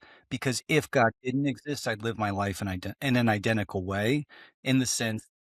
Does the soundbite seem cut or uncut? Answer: uncut